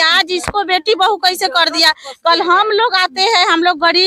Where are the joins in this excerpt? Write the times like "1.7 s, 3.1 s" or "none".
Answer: none